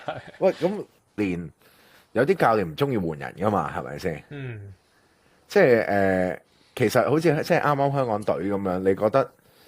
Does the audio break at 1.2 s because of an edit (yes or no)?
yes